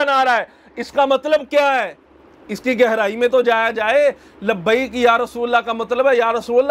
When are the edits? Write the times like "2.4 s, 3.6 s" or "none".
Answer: none